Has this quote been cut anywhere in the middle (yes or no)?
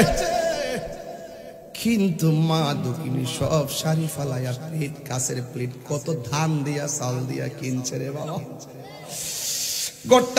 no